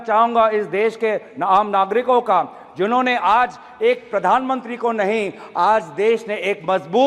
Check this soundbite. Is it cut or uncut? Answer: uncut